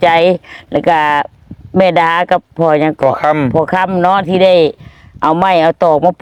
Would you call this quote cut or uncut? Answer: uncut